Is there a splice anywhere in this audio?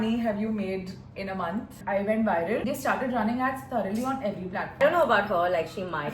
yes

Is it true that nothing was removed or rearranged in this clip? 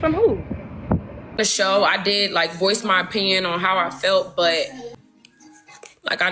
no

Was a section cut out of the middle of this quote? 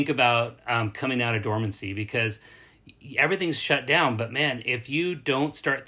no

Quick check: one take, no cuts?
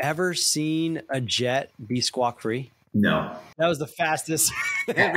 no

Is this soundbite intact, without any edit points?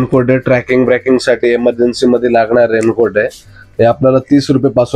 yes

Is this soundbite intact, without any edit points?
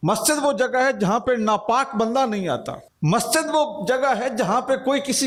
yes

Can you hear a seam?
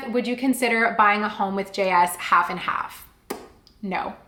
no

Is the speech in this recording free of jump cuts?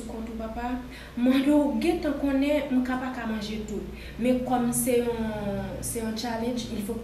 yes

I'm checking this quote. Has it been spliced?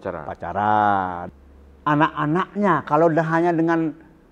yes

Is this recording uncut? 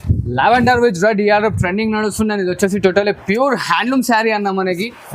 yes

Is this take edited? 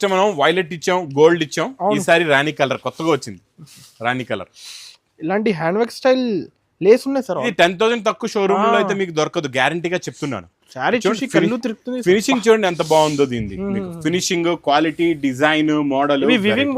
yes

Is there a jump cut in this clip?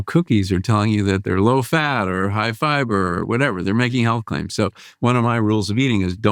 yes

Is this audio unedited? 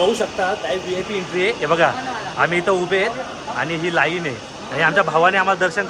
yes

